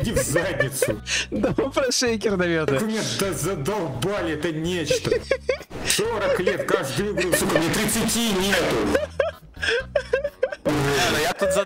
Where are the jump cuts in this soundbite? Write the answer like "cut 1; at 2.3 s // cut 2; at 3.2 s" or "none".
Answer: none